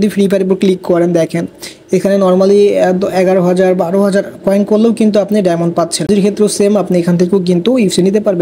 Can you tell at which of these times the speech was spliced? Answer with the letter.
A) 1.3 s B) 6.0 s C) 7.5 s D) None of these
B